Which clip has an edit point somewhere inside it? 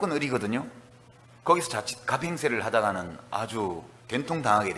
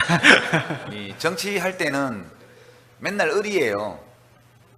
second; 1 cut; at 2.0 s

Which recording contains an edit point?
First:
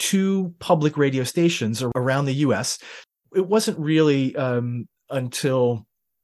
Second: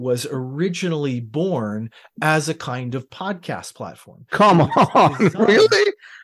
first; 2 cuts; at 1.9 s, 3.2 s

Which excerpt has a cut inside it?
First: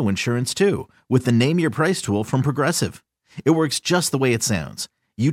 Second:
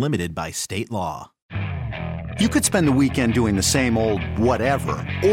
second; 1 cut; at 1.3 s

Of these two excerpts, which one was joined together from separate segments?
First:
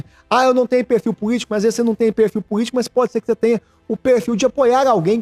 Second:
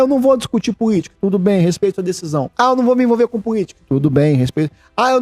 second; 3 cuts; at 1.1 s, 2.5 s, 3.8 s

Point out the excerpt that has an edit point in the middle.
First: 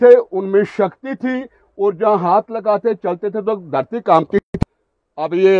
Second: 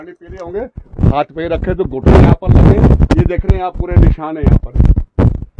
first; 1 cut; at 4.5 s

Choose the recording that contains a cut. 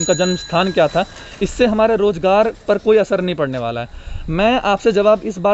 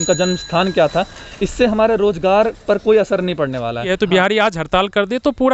second; 1 cut; at 3.9 s

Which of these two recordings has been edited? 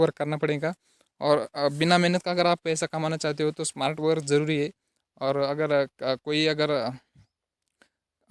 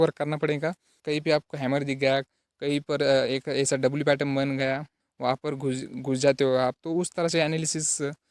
second; 2 cuts; at 1.0 s, 4.9 s

